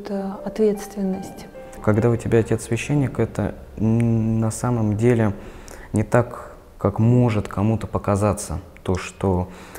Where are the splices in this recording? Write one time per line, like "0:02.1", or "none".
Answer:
0:01.8